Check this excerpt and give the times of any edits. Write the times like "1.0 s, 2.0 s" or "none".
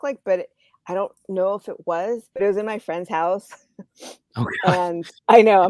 2.3 s

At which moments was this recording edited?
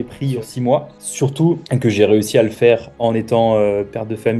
1.0 s

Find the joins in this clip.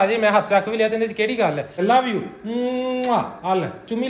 1.8 s

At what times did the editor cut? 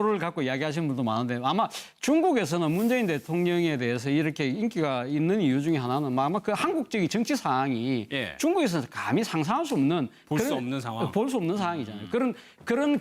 none

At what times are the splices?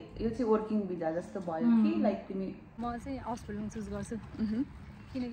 2.8 s

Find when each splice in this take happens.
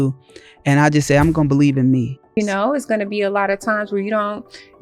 2.2 s

